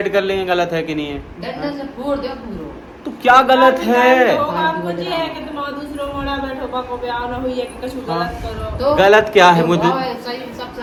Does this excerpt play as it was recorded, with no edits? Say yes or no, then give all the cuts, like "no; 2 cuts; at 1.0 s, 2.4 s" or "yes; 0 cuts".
yes; 0 cuts